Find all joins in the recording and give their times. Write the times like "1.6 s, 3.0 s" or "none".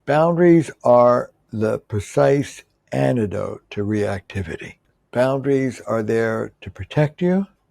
4.9 s